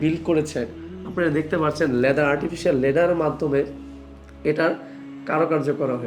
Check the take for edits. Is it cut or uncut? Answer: uncut